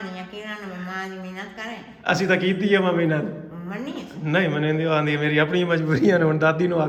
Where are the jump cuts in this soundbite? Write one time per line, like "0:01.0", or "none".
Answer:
none